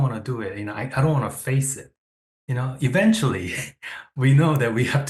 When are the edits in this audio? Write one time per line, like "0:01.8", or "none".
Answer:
none